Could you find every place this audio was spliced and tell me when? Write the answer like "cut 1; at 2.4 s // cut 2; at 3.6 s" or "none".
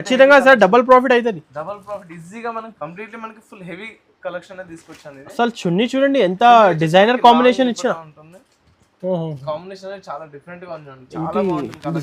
cut 1; at 2.7 s